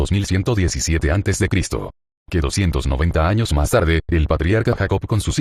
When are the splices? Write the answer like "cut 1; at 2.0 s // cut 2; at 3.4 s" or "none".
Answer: none

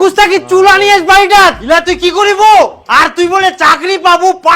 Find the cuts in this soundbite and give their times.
cut 1; at 1.6 s

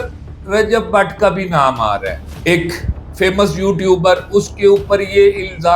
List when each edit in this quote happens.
cut 1; at 2.3 s

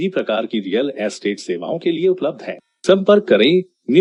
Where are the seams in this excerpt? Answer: none

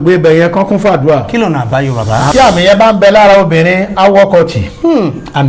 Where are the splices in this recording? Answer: cut 1; at 2.3 s

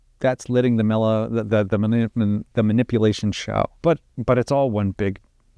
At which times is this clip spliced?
cut 1; at 3.8 s

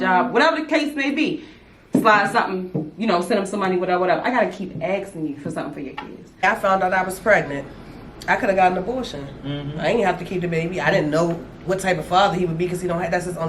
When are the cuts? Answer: cut 1; at 6.4 s

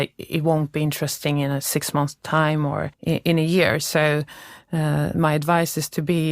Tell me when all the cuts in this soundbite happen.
cut 1; at 2.9 s

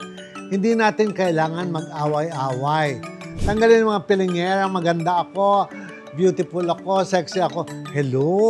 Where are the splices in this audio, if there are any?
cut 1; at 3.2 s

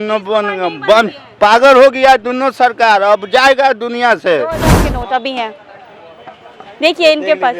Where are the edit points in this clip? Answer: cut 1; at 4.8 s

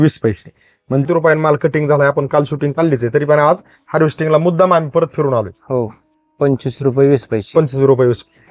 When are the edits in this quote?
cut 1; at 1.0 s

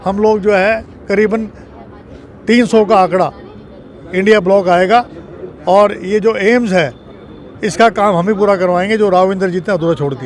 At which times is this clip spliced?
none

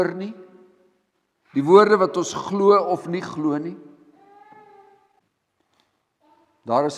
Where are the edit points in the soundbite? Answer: cut 1; at 5.1 s

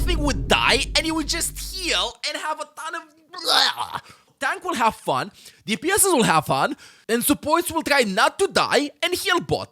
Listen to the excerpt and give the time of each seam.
cut 1; at 4.2 s

